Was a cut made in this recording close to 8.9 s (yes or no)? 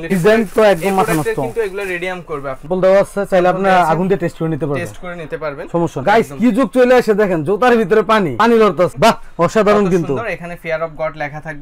yes